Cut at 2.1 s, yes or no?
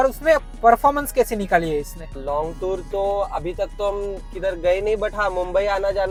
no